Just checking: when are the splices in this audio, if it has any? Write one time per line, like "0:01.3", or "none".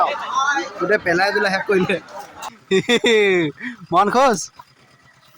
0:02.5